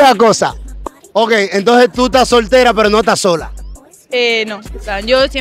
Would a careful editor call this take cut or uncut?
uncut